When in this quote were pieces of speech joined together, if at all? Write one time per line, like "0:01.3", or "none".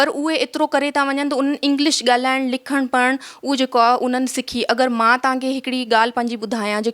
none